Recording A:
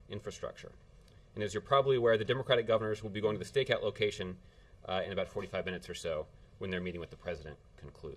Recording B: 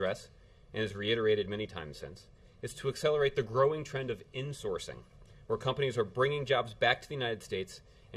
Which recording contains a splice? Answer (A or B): A